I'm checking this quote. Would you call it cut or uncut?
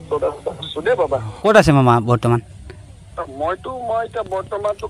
cut